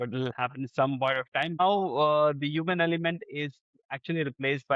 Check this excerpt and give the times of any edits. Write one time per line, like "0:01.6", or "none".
0:01.6